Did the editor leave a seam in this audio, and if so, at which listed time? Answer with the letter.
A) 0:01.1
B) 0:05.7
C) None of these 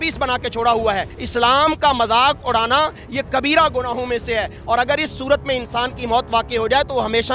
A